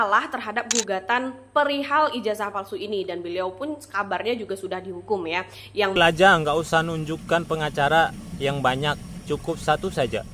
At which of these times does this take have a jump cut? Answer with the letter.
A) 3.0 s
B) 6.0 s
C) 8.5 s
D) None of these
B